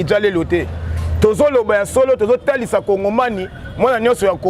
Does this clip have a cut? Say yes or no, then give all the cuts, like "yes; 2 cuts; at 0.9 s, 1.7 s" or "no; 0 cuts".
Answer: no; 0 cuts